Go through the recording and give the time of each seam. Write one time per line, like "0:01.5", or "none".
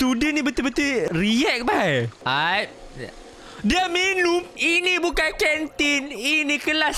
0:01.1
0:02.2
0:04.5